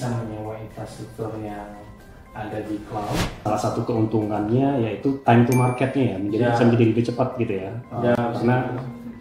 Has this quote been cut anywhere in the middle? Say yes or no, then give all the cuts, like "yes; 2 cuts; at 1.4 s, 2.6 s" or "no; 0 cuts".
yes; 1 cut; at 3.3 s